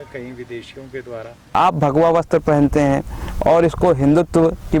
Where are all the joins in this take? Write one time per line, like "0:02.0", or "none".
0:01.3